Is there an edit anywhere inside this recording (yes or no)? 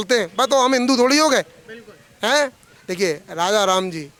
no